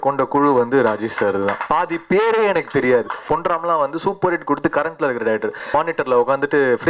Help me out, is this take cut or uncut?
cut